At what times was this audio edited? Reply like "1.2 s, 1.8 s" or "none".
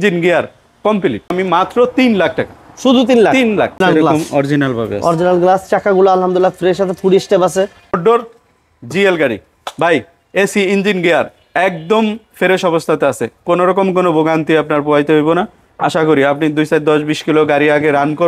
1.3 s, 3.8 s, 8.0 s